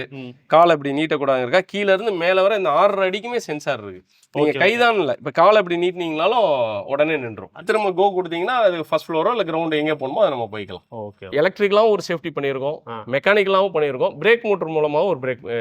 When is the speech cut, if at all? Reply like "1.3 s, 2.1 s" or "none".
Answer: 7.6 s, 11.3 s